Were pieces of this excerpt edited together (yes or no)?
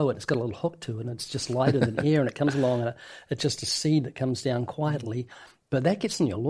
no